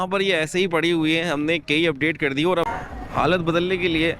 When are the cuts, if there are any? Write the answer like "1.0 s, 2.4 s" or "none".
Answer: 2.7 s